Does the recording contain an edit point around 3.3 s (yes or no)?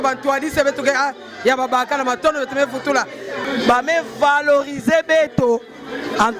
yes